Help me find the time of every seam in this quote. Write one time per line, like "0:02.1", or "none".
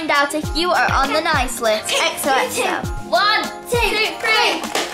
0:02.9